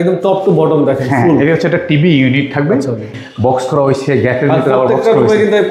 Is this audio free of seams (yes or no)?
no